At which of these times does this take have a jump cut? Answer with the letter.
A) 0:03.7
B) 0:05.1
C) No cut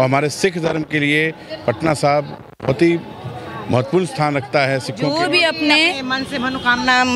B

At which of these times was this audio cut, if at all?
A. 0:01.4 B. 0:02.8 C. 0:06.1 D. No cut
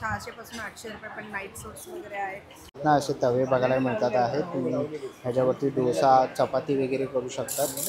B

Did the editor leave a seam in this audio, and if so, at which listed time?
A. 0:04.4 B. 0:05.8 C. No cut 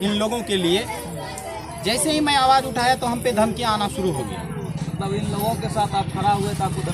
C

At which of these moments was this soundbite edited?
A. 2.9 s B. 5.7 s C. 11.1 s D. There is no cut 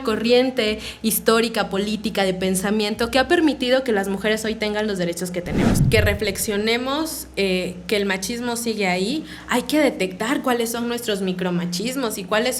B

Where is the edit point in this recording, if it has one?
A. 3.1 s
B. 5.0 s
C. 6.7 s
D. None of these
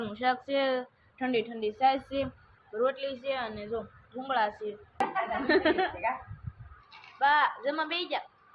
B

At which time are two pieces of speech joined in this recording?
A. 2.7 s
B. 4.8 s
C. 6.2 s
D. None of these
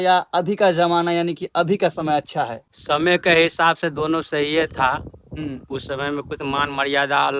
A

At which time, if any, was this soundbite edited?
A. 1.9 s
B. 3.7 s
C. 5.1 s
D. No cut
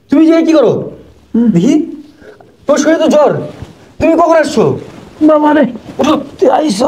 D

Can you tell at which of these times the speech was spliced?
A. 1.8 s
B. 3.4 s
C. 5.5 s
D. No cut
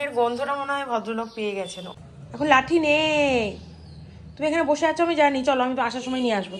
A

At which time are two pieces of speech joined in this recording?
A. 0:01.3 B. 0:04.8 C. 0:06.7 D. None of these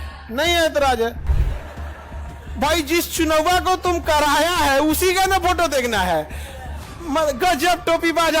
A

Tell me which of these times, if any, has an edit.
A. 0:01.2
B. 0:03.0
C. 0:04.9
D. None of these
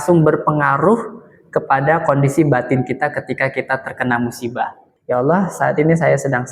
C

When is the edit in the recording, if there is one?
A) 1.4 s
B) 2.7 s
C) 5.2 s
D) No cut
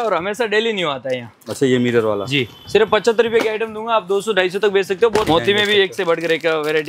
C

